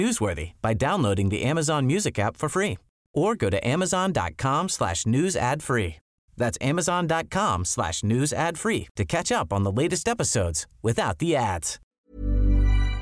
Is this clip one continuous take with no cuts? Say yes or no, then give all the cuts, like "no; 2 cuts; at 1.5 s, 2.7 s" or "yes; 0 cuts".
no; 1 cut; at 11.8 s